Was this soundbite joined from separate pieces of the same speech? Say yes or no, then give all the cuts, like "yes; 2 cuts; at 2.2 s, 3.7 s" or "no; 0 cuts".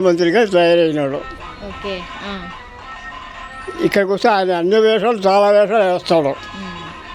no; 0 cuts